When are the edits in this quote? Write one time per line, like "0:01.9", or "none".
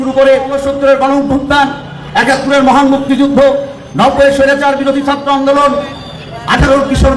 none